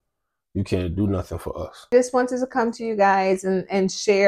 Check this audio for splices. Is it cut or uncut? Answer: cut